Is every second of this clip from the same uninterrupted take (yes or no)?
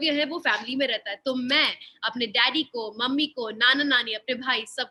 yes